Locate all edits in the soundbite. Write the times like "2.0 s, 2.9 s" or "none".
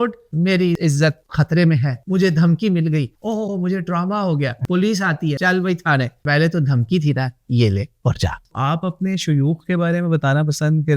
4.6 s, 5.4 s, 6.2 s, 8.4 s